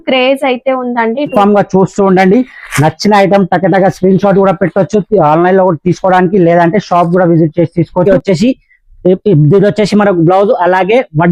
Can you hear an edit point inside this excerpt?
yes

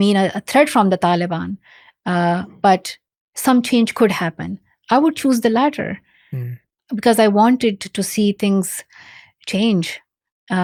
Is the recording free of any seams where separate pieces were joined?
yes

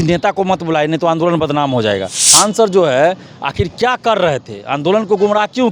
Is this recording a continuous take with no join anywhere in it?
no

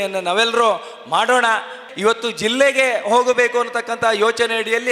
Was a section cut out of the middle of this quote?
yes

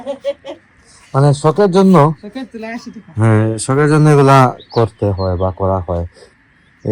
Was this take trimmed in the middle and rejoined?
no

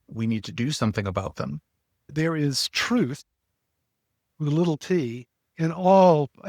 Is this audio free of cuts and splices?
no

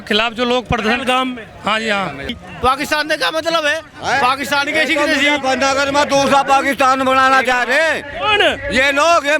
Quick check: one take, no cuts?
no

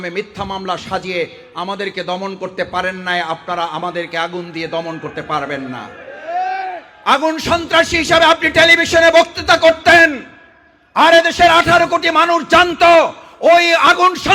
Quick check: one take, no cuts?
yes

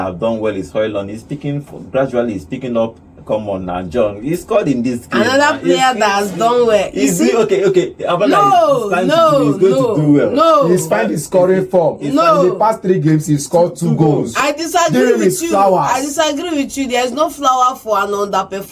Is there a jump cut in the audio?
no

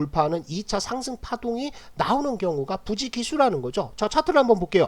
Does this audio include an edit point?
no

